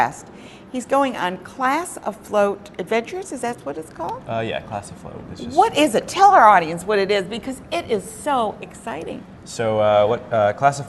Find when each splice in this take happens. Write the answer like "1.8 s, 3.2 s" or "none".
none